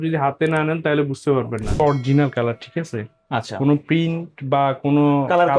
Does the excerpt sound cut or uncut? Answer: cut